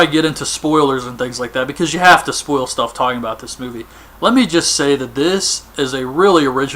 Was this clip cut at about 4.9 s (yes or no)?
yes